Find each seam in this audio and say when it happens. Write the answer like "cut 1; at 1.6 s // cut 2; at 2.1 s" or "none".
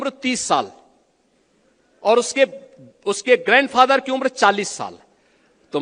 none